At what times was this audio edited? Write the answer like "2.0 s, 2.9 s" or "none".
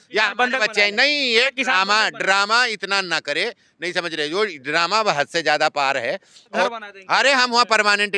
6.7 s